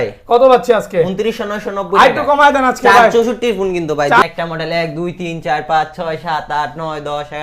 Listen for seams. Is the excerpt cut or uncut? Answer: cut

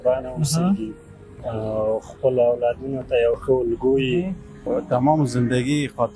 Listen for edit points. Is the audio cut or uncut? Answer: cut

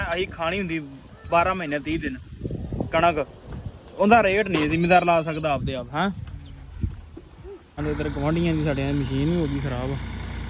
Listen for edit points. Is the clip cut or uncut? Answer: cut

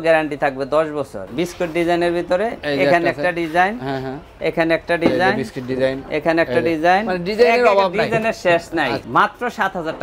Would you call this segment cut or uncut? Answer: cut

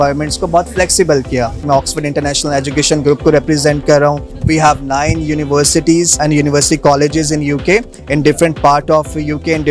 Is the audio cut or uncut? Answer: cut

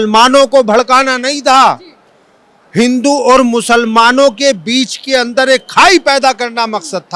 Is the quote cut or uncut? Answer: uncut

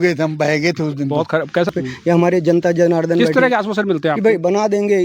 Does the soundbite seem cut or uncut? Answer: cut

